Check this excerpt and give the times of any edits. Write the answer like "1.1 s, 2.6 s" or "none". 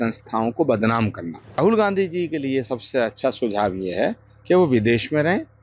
1.6 s